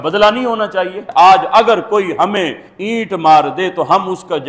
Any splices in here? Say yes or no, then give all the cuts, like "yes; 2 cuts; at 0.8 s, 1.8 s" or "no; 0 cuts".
yes; 1 cut; at 1.0 s